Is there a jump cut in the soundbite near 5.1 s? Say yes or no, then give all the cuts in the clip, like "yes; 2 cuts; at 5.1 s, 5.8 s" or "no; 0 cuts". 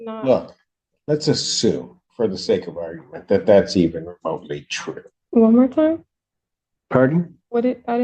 yes; 1 cut; at 5.1 s